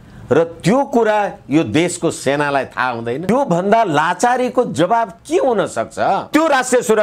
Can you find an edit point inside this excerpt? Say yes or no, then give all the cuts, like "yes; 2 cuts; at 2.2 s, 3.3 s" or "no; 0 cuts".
yes; 2 cuts; at 3.3 s, 6.3 s